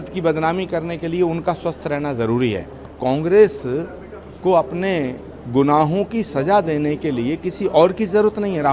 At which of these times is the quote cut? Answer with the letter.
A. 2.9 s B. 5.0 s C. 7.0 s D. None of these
A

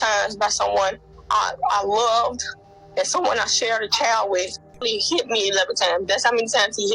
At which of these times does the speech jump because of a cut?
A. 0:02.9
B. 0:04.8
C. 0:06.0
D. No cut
B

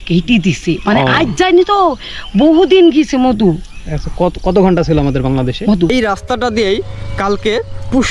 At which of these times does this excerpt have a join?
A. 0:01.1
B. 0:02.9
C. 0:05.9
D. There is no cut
C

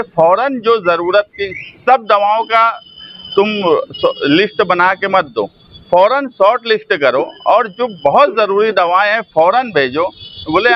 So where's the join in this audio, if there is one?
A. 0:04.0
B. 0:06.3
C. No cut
C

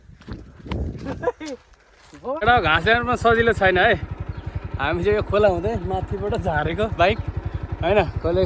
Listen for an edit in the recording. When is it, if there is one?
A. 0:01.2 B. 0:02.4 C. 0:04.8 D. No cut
B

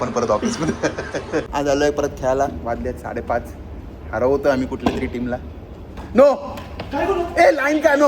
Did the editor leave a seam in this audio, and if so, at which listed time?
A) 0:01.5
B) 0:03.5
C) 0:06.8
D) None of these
A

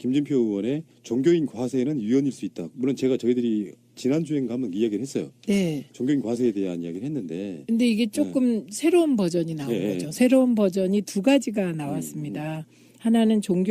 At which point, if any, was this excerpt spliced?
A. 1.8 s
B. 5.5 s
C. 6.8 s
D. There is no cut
B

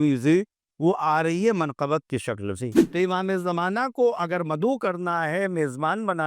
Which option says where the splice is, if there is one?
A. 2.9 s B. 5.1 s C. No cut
A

